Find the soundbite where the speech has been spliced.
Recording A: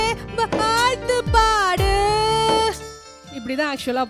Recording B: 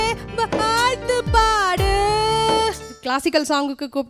B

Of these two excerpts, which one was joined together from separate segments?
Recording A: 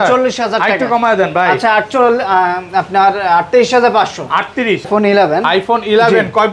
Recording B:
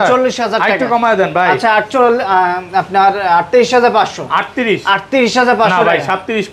A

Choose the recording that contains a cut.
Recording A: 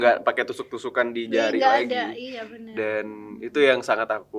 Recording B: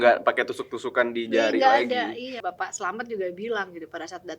B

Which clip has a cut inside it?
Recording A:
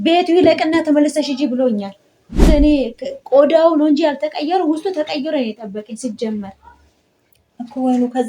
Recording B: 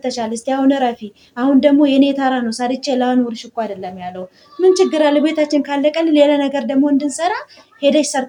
A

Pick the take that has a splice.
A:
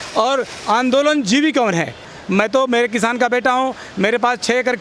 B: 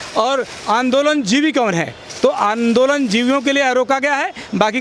A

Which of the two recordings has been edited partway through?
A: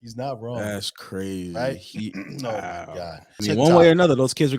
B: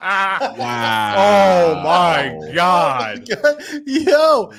A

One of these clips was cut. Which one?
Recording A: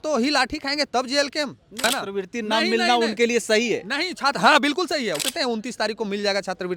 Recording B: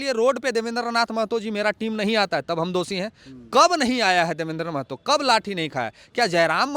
A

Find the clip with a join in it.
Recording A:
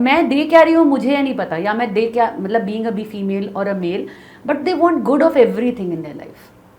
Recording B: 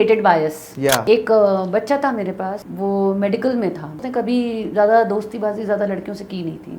B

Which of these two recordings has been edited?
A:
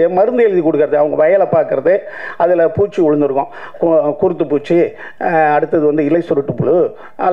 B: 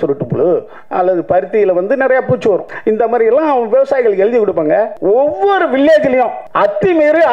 B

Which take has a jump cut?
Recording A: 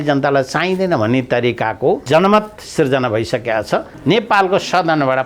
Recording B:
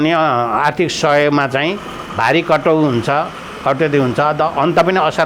A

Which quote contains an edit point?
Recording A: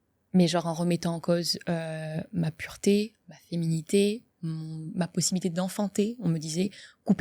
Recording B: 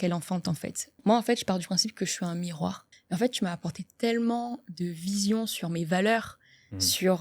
B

